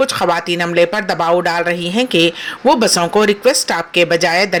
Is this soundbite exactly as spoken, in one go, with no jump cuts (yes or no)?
yes